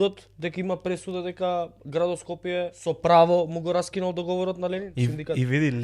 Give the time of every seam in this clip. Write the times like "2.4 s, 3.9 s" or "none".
2.8 s, 4.9 s